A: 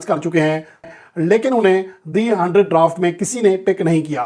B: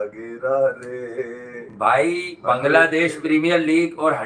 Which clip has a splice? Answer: A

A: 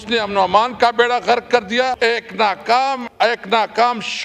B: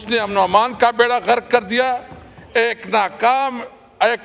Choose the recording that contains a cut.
A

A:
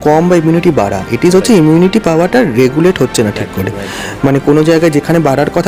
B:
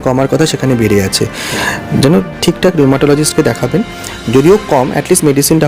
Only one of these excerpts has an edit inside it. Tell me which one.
B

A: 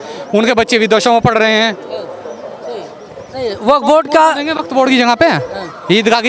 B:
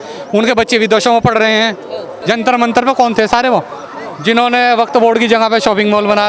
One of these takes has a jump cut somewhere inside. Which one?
B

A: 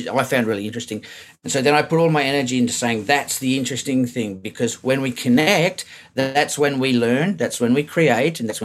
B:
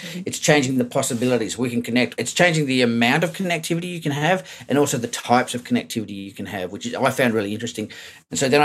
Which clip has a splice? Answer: B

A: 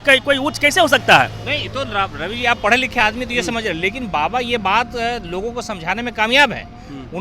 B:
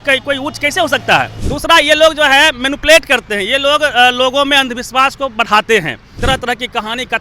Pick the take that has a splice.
B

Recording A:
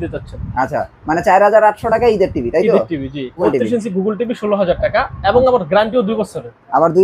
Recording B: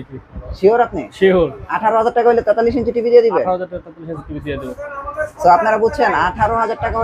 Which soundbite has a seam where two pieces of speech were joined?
A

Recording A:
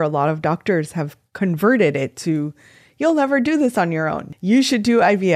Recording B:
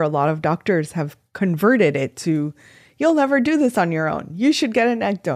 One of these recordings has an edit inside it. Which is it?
A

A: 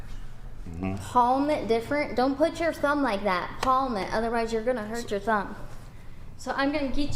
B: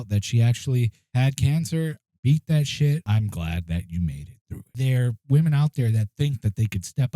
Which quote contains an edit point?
B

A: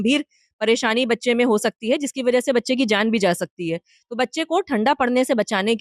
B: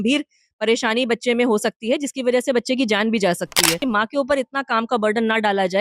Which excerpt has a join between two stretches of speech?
B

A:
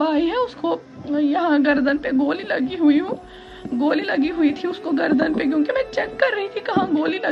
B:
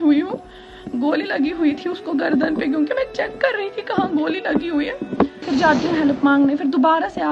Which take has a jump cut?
B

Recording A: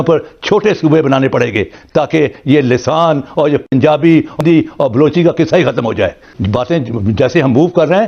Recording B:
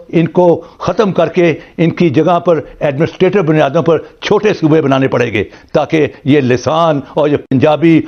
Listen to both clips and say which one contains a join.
A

